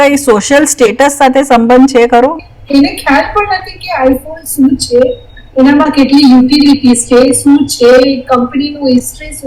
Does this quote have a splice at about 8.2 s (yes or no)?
no